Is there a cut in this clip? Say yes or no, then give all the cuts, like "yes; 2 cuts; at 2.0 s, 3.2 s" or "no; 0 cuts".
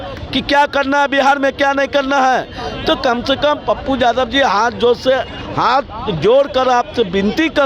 no; 0 cuts